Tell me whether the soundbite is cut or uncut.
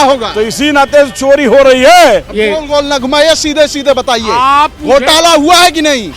cut